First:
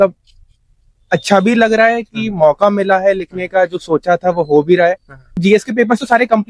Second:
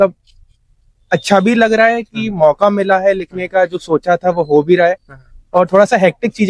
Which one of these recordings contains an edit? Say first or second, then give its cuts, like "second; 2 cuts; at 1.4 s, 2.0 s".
first; 1 cut; at 5.3 s